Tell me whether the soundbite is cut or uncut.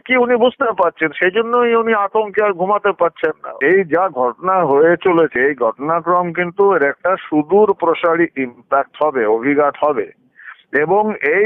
cut